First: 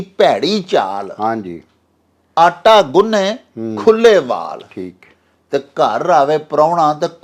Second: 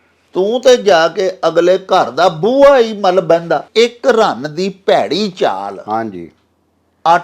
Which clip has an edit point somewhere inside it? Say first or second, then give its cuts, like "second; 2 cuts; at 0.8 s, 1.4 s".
second; 1 cut; at 3.7 s